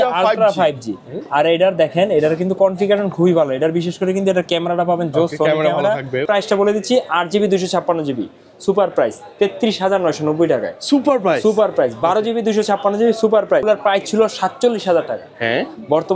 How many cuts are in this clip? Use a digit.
2